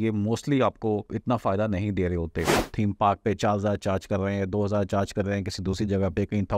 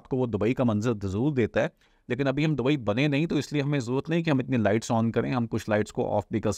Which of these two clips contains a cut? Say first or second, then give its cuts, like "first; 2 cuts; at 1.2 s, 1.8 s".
first; 2 cuts; at 1.1 s, 2.7 s